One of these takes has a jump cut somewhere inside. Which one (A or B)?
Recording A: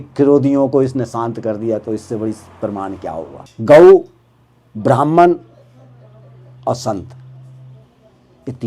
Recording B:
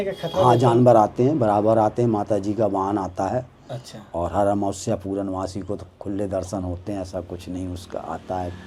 A